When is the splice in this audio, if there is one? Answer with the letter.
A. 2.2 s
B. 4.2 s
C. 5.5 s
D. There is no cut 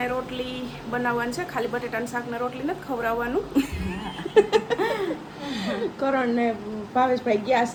D